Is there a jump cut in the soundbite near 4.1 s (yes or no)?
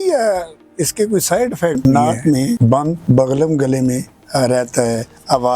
no